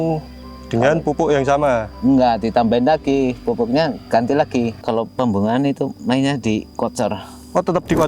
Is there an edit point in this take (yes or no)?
yes